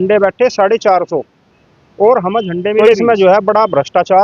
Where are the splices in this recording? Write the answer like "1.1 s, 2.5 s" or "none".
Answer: 2.8 s